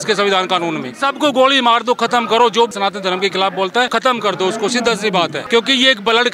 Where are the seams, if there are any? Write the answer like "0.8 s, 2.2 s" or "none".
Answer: 0.9 s, 2.7 s, 3.9 s, 5.4 s